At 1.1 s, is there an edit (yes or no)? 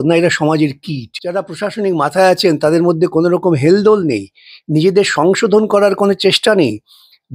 yes